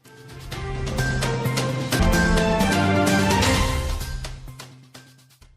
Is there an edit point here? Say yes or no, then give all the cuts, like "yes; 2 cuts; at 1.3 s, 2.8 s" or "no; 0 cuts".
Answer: yes; 1 cut; at 2.0 s